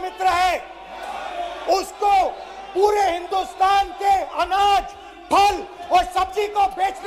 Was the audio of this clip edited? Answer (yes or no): no